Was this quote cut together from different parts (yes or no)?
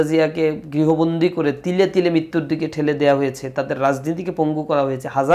no